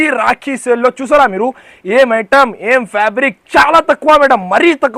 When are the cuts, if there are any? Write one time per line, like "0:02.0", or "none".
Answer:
none